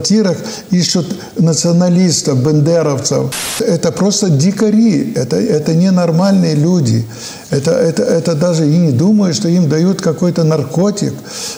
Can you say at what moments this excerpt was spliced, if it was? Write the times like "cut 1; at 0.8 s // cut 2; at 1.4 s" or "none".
cut 1; at 3.6 s